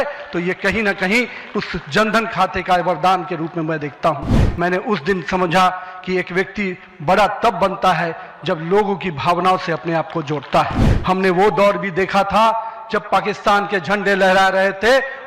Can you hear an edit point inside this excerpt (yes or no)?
yes